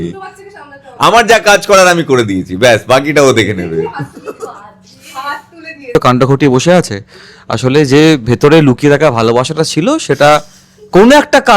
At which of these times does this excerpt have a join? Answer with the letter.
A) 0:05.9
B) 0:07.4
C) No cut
A